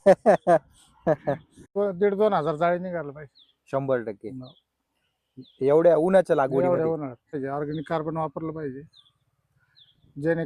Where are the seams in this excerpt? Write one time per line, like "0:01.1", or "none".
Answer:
0:01.6
0:07.3